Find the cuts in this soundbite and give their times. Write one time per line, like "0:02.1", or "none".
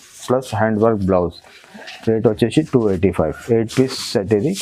none